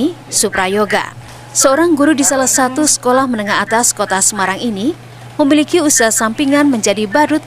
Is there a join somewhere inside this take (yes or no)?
no